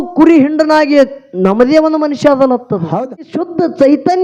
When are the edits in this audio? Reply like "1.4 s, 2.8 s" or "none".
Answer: 3.2 s